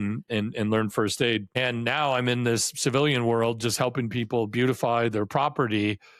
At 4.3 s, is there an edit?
no; 1 cut; at 1.5 s

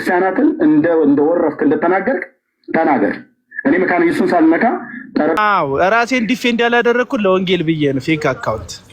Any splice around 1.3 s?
no; 1 cut; at 5.4 s

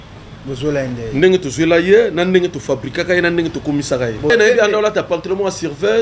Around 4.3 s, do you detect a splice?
yes; 1 cut; at 4.3 s

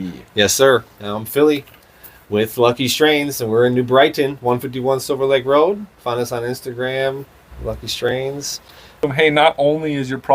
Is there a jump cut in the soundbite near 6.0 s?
no; 1 cut; at 9.0 s

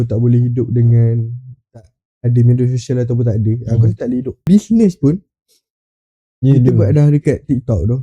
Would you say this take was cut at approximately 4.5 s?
yes; 1 cut; at 4.5 s

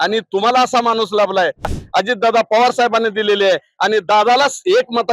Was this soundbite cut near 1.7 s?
yes; 1 cut; at 1.7 s

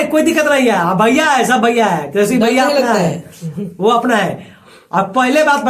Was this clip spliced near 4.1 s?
no; 0 cuts

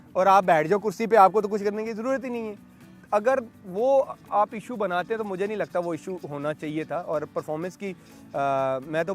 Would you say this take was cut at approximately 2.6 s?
no; 0 cuts

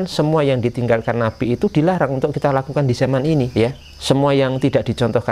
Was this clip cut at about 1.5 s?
no; 1 cut; at 3.5 s

